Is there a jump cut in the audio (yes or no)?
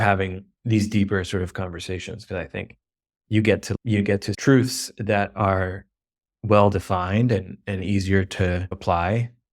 yes